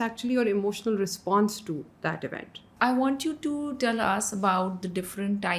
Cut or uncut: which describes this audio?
cut